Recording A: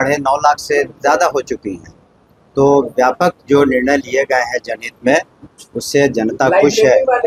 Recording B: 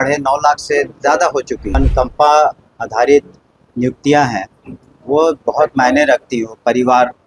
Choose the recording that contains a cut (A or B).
B